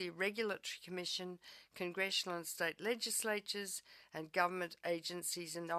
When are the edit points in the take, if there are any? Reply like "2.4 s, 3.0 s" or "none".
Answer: none